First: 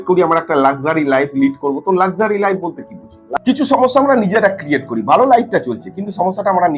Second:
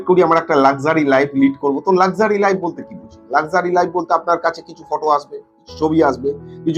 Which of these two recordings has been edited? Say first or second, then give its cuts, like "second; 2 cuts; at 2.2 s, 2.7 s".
first; 1 cut; at 3.4 s